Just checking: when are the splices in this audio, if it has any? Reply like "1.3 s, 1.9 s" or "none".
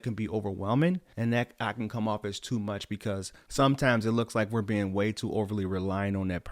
1.1 s